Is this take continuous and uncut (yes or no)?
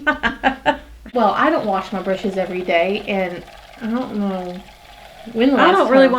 no